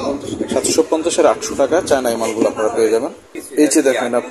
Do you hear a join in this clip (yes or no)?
yes